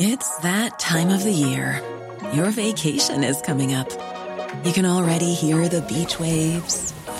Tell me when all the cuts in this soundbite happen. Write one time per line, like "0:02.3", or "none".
none